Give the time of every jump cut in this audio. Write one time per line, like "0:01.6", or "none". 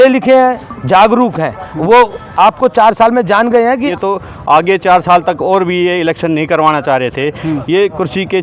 0:03.9